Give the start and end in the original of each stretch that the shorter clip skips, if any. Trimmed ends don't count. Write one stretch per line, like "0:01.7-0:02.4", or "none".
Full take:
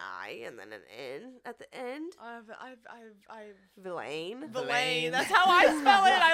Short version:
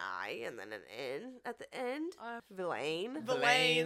0:02.4-0:03.7